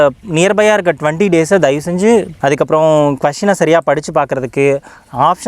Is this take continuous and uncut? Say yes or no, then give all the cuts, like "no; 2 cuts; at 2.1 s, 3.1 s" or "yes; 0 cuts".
no; 1 cut; at 2.3 s